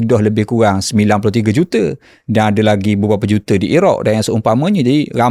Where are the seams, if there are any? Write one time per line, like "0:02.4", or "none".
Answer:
none